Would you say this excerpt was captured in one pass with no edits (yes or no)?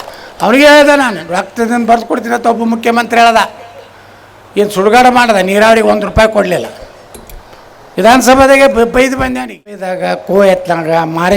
no